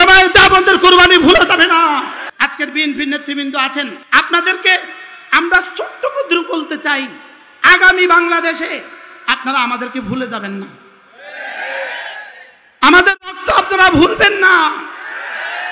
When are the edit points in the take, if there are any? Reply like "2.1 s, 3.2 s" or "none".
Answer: 2.2 s